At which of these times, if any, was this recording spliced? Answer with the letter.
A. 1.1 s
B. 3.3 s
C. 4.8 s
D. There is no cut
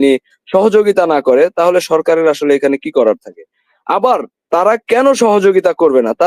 D